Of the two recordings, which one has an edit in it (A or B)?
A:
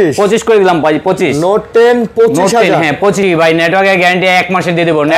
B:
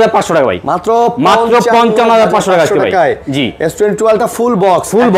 A